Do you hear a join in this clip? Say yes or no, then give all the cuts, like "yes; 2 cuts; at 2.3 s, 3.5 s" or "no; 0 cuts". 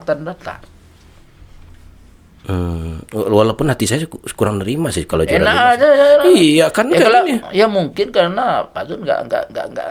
no; 0 cuts